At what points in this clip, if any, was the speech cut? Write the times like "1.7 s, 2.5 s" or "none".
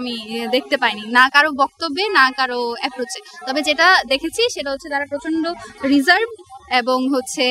none